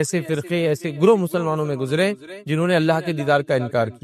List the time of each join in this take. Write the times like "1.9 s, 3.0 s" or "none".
none